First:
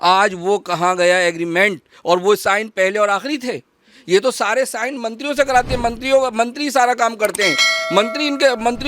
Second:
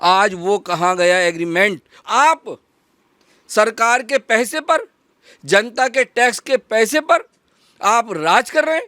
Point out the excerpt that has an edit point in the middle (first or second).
second